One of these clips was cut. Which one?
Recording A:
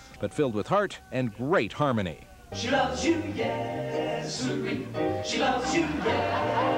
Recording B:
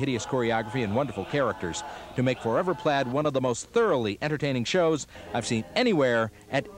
B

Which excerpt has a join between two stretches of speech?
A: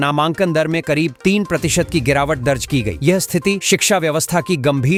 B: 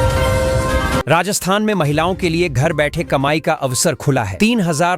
B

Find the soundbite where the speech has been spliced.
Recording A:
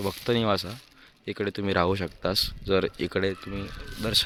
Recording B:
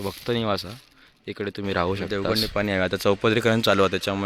B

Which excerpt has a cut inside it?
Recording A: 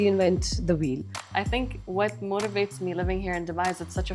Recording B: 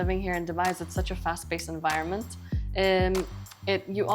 A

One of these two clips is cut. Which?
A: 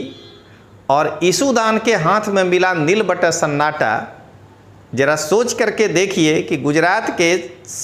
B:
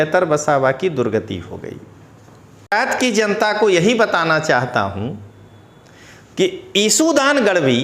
B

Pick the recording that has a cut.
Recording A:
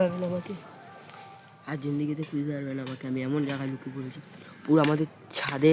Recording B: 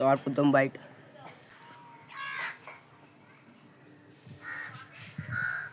B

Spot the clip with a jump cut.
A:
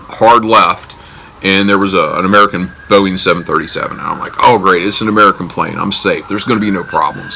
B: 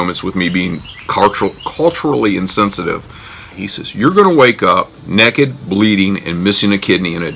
B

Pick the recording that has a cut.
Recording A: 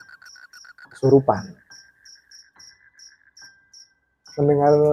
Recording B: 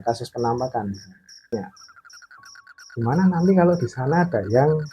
B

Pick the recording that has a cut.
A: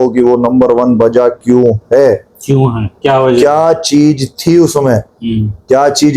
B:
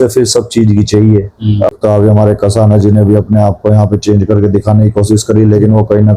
B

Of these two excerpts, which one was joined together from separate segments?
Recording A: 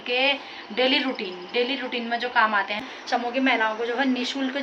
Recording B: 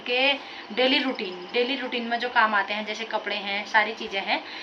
A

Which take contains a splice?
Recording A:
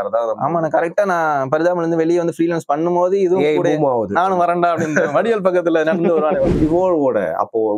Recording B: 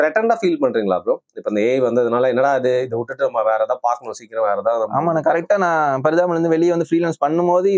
A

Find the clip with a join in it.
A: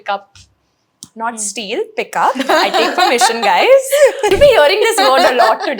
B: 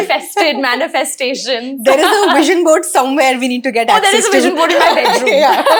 A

